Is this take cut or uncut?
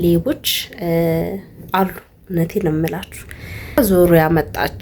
cut